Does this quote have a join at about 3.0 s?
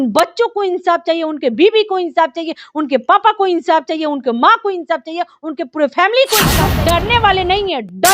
no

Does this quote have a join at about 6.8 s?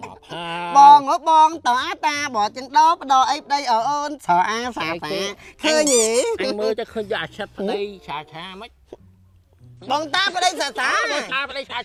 no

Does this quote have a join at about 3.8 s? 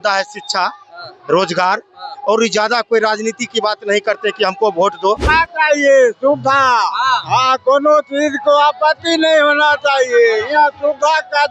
no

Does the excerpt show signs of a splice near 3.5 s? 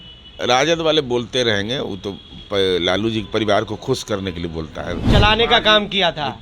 no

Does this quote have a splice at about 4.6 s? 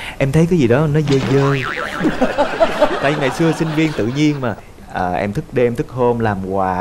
yes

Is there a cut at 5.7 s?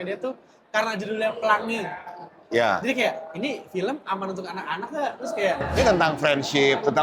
yes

